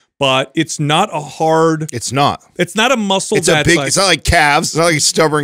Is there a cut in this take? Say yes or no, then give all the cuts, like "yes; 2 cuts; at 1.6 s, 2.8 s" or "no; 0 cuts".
no; 0 cuts